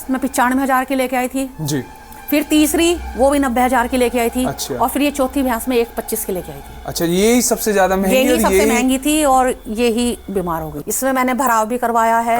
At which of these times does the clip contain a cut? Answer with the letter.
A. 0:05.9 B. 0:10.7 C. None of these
B